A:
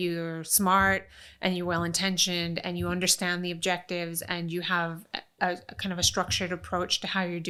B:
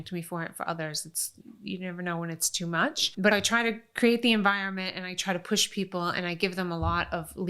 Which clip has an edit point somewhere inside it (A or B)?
B